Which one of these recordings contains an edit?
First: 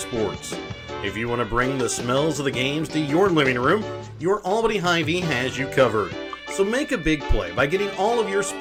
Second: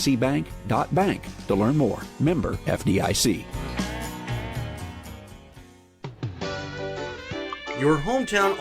second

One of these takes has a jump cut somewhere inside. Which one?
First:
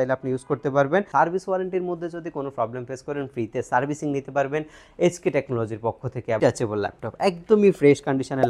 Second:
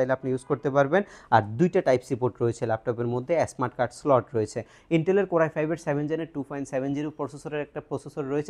first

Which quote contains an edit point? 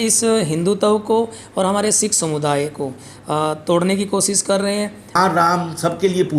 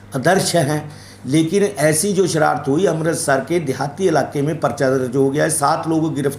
first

